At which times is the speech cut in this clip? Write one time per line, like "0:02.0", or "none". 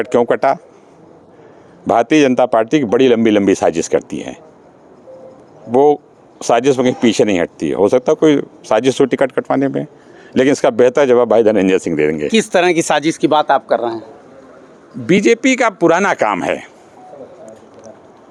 none